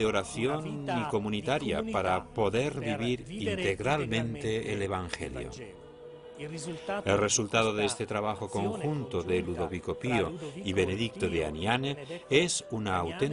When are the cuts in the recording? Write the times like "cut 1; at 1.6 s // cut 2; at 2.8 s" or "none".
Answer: none